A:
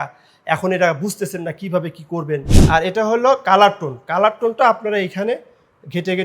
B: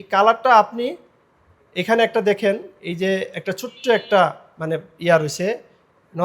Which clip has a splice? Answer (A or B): A